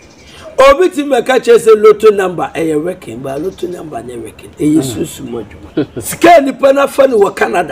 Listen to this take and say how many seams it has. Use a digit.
1